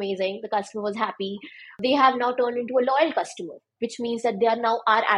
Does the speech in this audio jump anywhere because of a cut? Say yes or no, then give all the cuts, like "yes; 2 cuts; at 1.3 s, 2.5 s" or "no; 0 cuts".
yes; 1 cut; at 1.8 s